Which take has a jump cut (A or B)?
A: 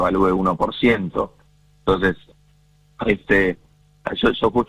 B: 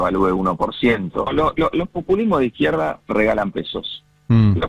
B